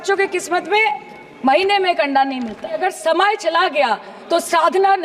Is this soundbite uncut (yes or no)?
no